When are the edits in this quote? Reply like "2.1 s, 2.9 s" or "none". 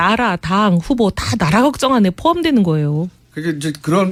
none